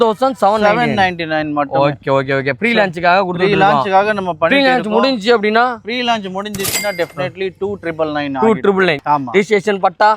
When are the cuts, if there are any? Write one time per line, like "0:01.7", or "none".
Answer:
0:09.0